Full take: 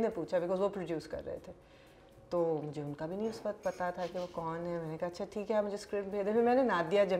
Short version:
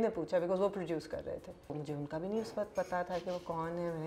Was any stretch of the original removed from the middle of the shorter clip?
yes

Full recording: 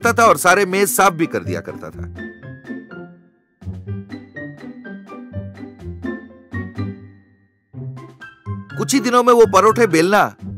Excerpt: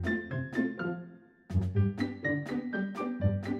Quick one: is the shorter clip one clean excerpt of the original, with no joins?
yes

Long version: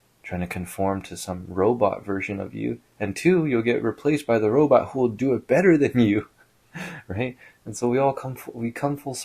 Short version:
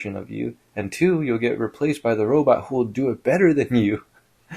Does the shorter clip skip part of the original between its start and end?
no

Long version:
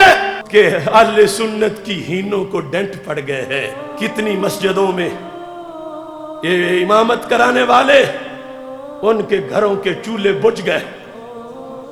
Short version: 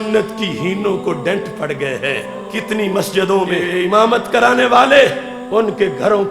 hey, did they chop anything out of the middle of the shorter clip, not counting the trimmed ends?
yes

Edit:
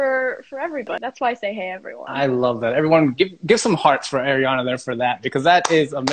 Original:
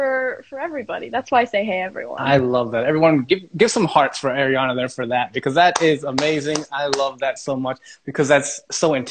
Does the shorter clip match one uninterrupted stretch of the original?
no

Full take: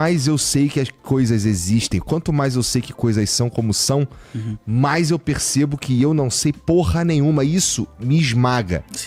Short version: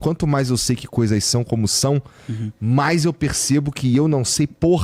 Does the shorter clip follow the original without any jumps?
yes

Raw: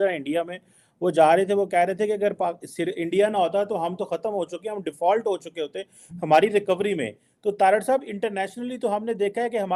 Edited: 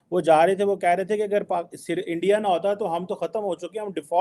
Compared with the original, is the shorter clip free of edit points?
yes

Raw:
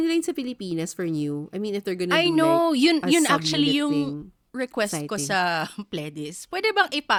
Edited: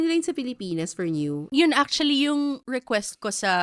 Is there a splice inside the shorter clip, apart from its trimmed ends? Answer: yes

